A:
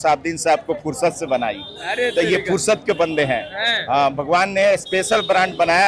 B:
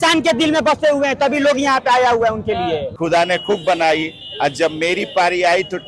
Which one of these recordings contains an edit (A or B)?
B